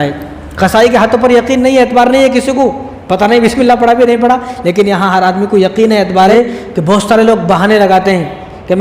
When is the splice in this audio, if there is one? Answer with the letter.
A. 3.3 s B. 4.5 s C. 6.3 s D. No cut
C